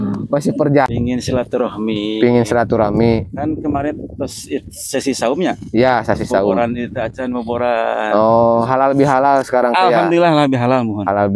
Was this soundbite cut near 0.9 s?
yes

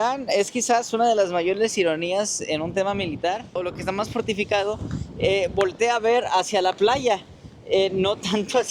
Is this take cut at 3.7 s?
yes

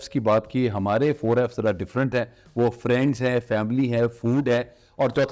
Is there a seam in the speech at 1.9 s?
no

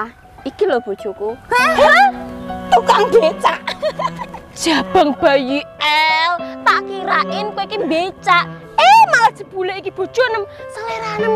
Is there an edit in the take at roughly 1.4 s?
yes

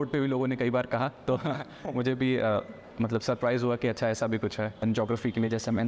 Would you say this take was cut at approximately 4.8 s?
yes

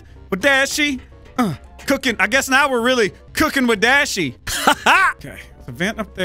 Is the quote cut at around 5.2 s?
yes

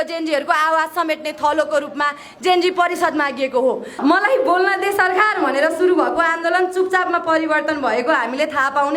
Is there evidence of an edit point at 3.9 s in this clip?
yes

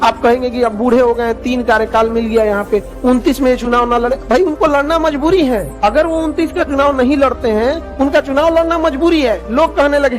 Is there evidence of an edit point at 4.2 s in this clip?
no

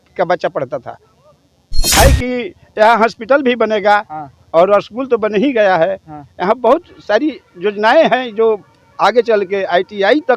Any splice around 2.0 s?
yes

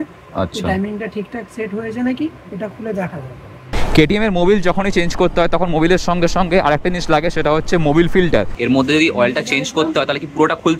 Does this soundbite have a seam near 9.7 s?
no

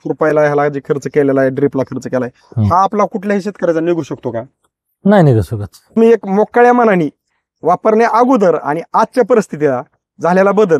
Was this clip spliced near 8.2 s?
no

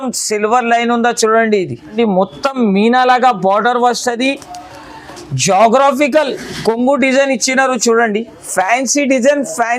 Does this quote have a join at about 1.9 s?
yes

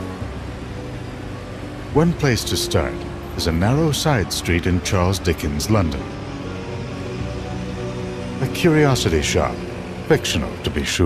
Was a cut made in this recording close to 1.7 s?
no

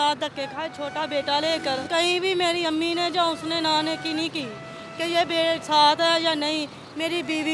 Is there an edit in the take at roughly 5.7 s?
no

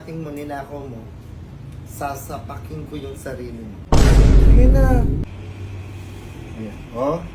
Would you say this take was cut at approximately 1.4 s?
no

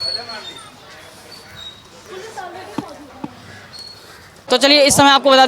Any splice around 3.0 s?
no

